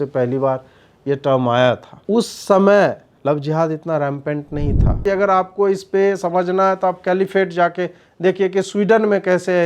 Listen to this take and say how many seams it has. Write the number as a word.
three